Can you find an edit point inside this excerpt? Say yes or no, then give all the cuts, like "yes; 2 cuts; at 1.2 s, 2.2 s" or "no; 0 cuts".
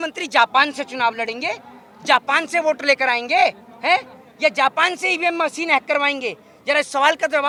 no; 0 cuts